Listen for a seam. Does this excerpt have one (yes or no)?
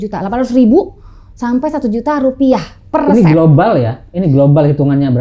no